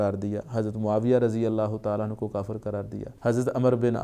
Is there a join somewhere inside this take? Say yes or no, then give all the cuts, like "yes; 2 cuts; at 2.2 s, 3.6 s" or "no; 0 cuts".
yes; 1 cut; at 3.0 s